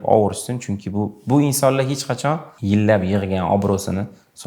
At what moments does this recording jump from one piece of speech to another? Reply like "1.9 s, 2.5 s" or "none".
2.5 s

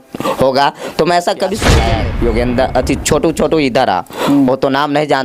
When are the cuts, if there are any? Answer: 1.8 s

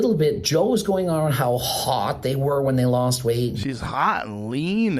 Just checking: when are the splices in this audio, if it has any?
3.7 s

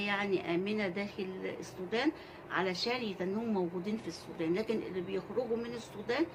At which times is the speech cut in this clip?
none

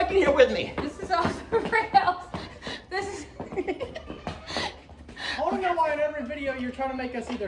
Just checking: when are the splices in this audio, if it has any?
none

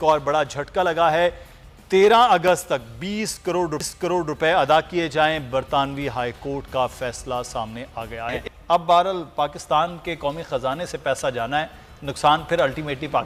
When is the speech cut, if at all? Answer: none

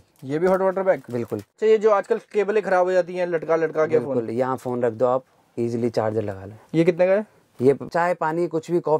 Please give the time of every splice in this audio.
1.5 s, 7.9 s

